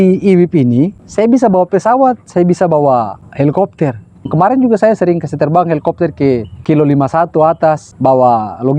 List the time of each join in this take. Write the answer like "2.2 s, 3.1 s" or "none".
1.0 s, 3.2 s, 4.2 s, 6.5 s, 7.9 s